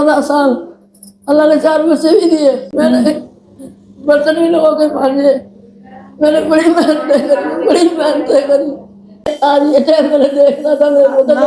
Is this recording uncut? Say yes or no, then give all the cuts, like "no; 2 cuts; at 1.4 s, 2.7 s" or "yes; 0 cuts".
no; 2 cuts; at 2.7 s, 9.3 s